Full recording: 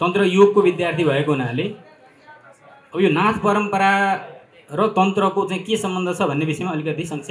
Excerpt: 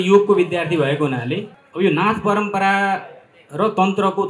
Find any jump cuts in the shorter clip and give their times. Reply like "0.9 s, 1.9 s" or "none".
1.6 s